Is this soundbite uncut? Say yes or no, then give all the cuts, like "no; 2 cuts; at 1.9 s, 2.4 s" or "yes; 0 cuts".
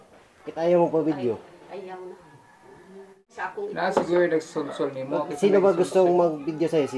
no; 1 cut; at 3.4 s